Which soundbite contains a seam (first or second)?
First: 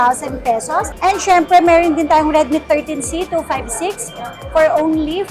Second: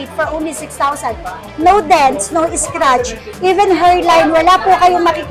first